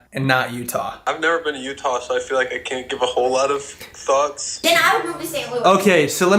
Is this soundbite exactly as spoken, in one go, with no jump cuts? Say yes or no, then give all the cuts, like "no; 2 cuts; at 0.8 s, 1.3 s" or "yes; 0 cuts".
no; 2 cuts; at 0.9 s, 4.5 s